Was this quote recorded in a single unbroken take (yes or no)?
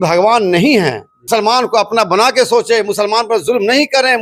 no